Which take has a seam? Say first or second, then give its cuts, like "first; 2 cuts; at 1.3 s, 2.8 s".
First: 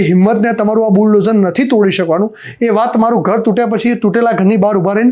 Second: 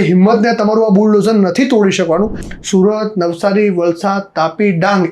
second; 1 cut; at 2.4 s